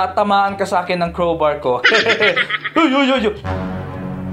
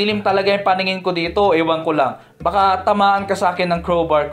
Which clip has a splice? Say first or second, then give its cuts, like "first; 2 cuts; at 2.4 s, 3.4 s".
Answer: first; 1 cut; at 3.4 s